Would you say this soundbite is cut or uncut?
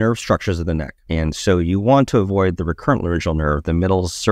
cut